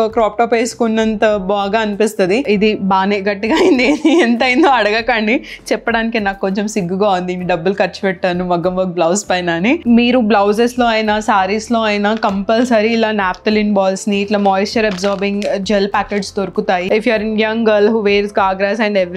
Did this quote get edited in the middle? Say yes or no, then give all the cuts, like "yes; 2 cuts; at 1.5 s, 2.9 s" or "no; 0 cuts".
yes; 3 cuts; at 2.5 s, 9.8 s, 16.8 s